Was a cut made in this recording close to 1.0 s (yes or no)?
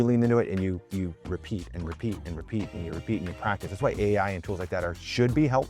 no